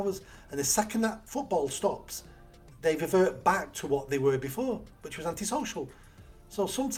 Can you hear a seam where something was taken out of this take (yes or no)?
yes